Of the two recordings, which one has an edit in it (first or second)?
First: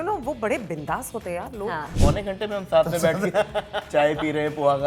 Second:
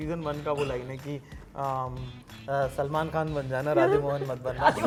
first